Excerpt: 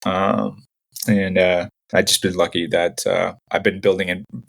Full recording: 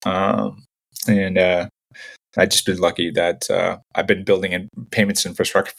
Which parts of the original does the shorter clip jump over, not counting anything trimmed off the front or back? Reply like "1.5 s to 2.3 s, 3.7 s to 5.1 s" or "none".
1.8 s to 2.2 s